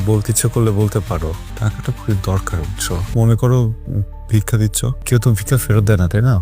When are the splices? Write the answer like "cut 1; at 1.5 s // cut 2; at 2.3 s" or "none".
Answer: cut 1; at 1.5 s // cut 2; at 3.0 s // cut 3; at 5.0 s

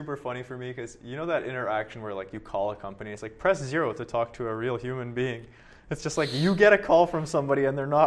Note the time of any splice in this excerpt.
none

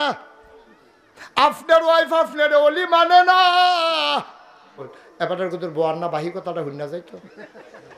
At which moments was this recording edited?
cut 1; at 5.0 s

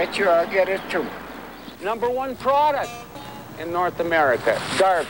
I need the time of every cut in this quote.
cut 1; at 1.8 s

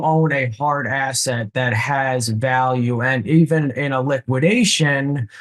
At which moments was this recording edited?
none

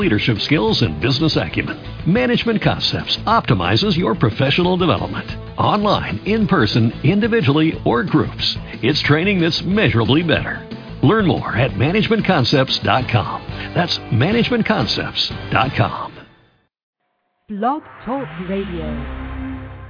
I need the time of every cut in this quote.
cut 1; at 17.4 s

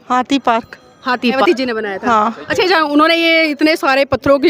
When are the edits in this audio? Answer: cut 1; at 1.4 s

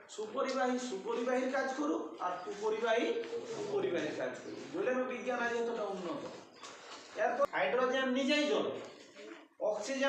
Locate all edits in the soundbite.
cut 1; at 7.5 s

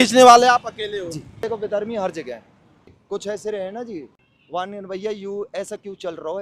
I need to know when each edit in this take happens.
cut 1; at 1.4 s // cut 2; at 2.9 s // cut 3; at 4.2 s

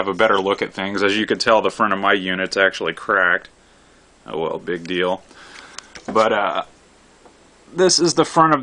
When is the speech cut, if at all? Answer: none

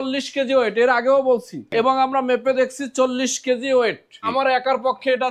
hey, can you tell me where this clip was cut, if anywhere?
cut 1; at 1.7 s // cut 2; at 4.3 s

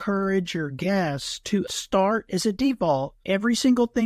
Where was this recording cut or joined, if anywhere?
cut 1; at 1.7 s // cut 2; at 3.2 s

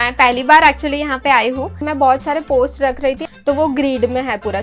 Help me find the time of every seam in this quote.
cut 1; at 1.8 s // cut 2; at 3.2 s

